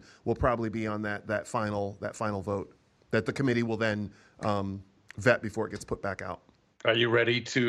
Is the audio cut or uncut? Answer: cut